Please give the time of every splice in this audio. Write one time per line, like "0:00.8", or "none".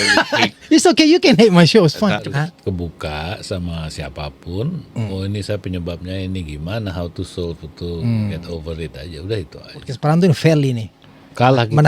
0:02.2
0:09.9